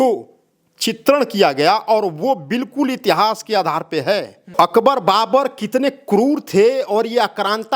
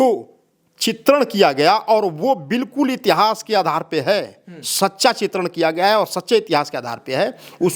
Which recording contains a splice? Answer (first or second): first